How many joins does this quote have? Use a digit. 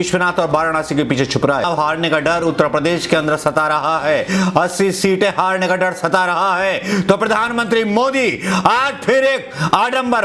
1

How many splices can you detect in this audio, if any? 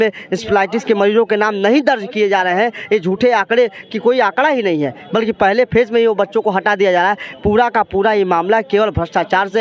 0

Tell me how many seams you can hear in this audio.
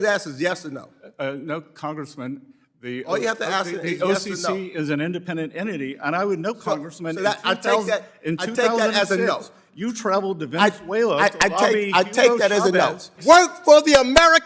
1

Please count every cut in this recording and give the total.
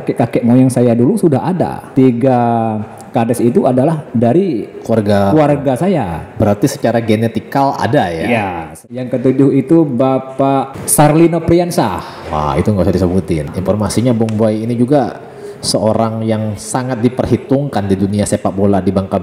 4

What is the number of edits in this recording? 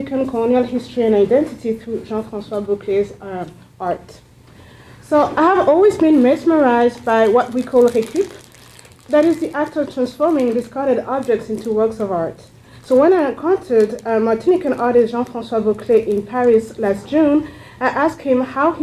1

